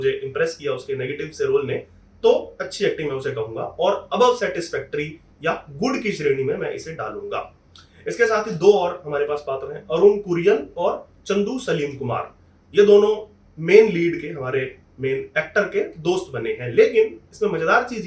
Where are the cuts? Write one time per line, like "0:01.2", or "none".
none